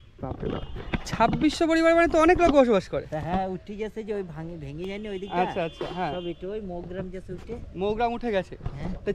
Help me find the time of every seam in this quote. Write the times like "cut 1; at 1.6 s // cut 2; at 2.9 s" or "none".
none